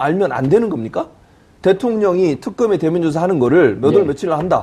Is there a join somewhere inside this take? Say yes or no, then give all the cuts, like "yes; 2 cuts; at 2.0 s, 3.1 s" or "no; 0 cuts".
yes; 1 cut; at 1.3 s